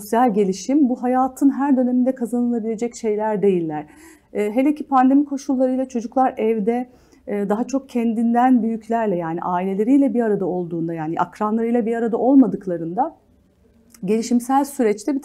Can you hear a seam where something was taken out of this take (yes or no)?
no